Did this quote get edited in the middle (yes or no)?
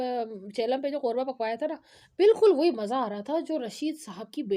no